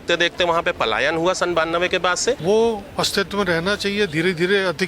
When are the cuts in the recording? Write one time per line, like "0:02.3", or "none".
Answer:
0:02.4